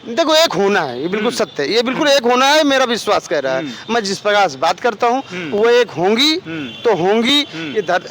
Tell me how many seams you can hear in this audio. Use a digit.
0